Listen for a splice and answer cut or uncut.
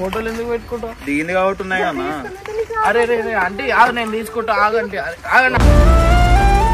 uncut